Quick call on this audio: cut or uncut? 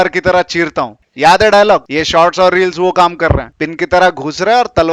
uncut